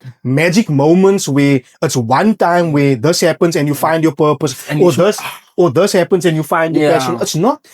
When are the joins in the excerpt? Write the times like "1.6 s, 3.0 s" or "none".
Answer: none

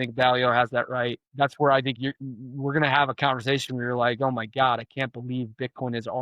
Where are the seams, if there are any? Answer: 1.2 s

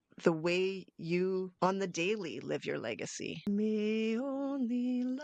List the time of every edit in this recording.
1.5 s, 3.4 s

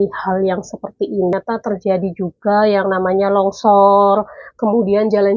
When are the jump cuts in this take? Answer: 1.3 s

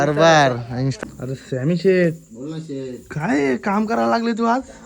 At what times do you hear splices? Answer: 0.9 s

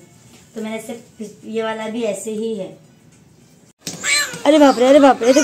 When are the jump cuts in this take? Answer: 3.8 s

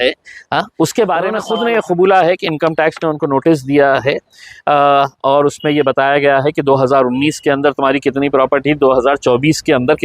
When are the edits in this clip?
1.4 s

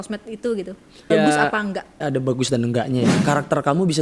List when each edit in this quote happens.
1.1 s, 2.0 s, 3.2 s

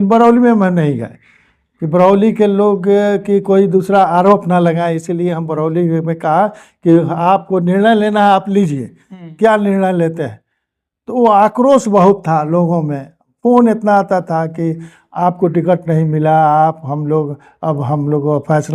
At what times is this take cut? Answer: none

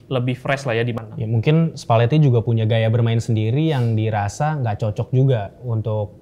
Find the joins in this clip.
1.0 s

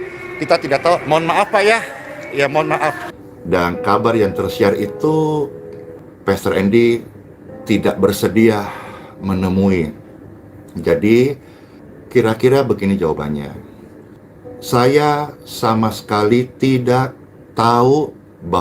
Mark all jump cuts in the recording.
3.1 s

